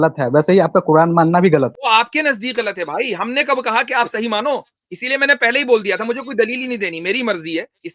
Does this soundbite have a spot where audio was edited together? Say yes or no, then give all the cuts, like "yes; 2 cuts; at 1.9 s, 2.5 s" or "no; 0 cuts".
yes; 1 cut; at 1.8 s